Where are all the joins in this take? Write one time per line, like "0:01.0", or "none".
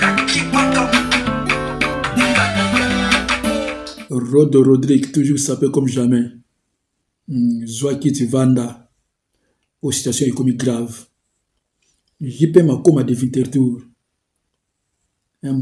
0:03.7